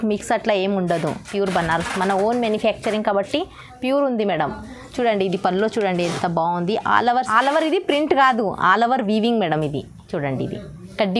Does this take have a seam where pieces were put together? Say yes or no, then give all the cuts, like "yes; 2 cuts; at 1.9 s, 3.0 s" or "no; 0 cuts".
yes; 1 cut; at 7.3 s